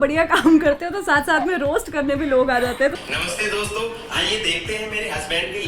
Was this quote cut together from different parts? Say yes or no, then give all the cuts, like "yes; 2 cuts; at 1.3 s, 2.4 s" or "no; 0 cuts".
yes; 1 cut; at 2.9 s